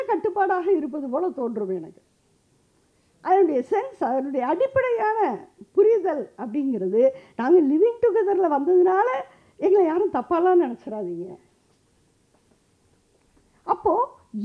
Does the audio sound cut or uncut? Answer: uncut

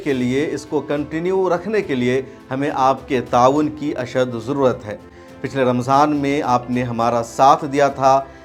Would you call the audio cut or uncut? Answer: uncut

